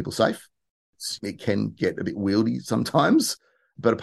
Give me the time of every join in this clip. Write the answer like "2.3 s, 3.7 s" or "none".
1.1 s